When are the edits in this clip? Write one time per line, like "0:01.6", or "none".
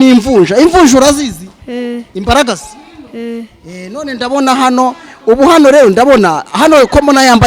none

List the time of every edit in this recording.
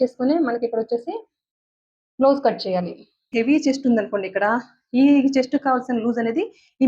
0:03.2

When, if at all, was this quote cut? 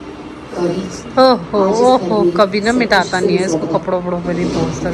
none

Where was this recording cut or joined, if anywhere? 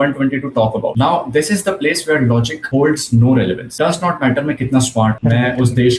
0:00.9
0:02.6
0:03.6
0:05.2

